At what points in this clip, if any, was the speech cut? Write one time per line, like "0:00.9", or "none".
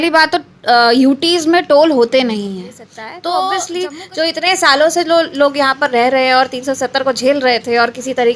0:03.7